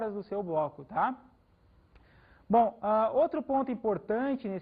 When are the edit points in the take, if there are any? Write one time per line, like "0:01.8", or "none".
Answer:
0:03.7